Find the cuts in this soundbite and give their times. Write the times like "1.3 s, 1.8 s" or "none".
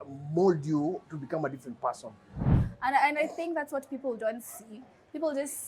2.5 s

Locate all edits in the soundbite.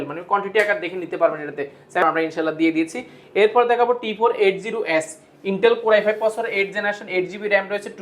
2.0 s

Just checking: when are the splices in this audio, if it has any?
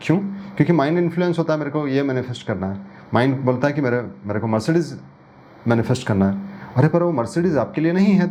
none

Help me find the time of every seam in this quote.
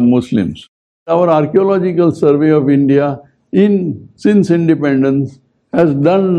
1.1 s

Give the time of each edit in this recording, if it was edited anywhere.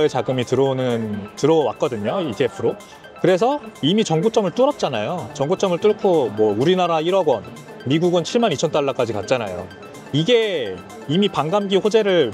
none

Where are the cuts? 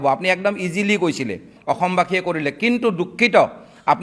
1.5 s

